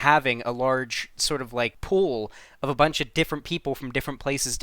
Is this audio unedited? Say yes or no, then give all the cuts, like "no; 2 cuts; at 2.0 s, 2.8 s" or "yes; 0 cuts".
no; 1 cut; at 1.7 s